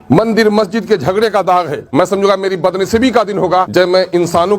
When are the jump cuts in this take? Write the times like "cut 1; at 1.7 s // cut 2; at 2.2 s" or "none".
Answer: cut 1; at 1.8 s // cut 2; at 3.7 s